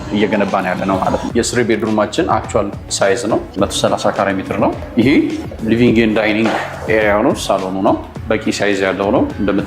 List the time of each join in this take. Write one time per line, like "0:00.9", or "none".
0:01.3